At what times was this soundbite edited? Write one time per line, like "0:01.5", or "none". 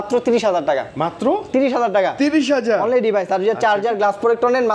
none

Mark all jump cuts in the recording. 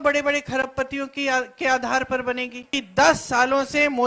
0:02.8

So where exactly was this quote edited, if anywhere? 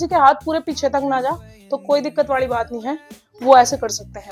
none

